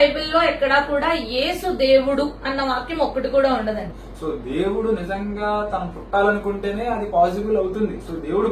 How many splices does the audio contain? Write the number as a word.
one